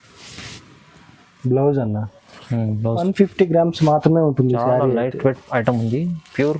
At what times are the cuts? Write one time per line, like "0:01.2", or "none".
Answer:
0:03.0